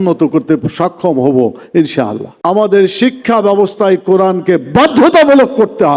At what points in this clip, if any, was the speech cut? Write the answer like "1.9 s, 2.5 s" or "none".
2.3 s